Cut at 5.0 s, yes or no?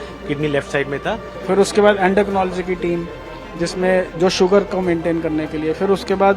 no